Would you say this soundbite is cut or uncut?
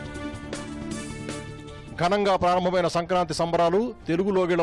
cut